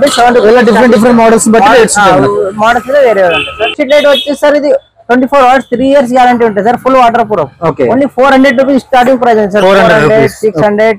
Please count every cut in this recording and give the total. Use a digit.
1